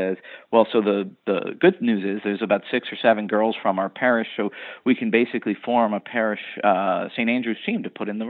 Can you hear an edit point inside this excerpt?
no; 0 cuts

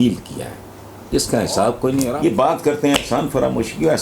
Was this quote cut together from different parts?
yes; 1 cut; at 2.1 s

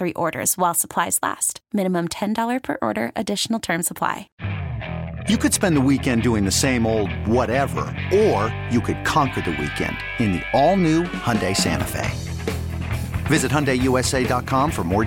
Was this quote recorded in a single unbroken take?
no; 1 cut; at 4.3 s

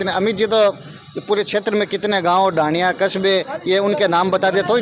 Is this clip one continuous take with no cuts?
yes; 0 cuts

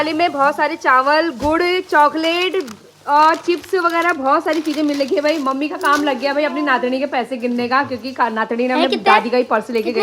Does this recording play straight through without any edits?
yes; 0 cuts

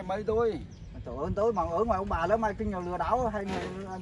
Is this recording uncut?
yes; 0 cuts

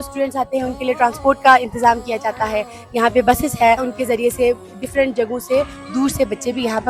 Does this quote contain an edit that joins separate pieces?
no; 0 cuts

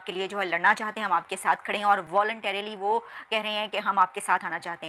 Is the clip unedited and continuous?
yes; 0 cuts

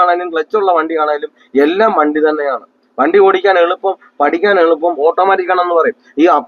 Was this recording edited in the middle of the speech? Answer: no; 0 cuts

